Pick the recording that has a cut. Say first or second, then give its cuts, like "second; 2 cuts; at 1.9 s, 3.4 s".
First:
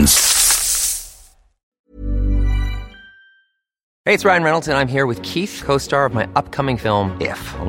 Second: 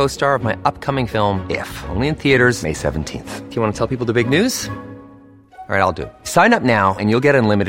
first; 1 cut; at 1.9 s